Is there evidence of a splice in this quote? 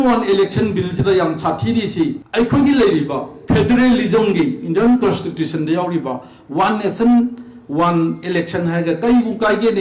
yes; 1 cut; at 2.2 s

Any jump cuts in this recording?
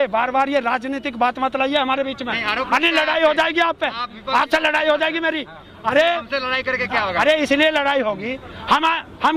no; 0 cuts

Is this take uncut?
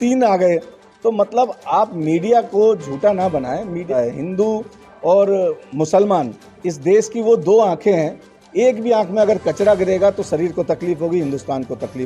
no; 2 cuts; at 3.9 s, 7.8 s

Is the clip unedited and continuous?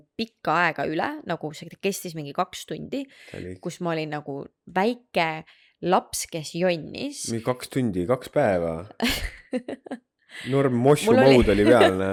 yes; 0 cuts

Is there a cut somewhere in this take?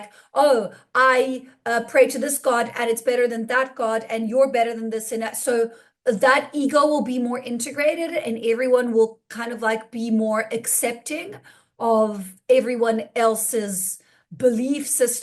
no; 0 cuts

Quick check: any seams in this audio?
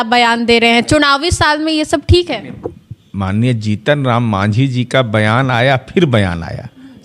no; 0 cuts

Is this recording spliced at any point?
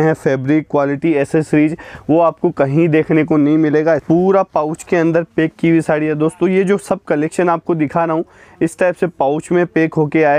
yes; 1 cut; at 4.0 s

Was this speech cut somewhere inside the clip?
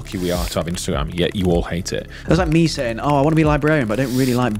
yes; 1 cut; at 2.1 s

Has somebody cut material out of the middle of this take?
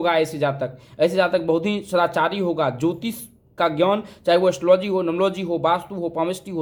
no; 0 cuts

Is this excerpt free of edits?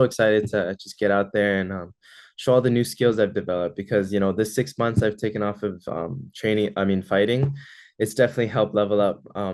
yes; 0 cuts

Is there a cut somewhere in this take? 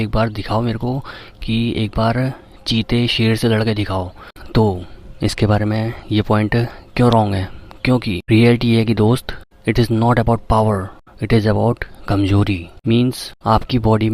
no; 0 cuts

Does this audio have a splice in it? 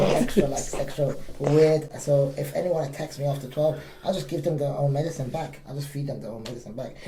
no; 0 cuts

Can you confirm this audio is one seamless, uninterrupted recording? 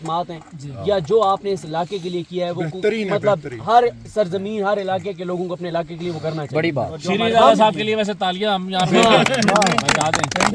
yes; 0 cuts

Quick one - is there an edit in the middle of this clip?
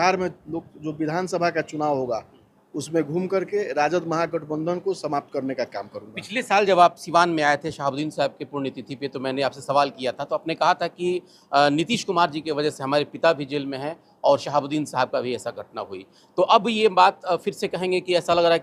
no; 0 cuts

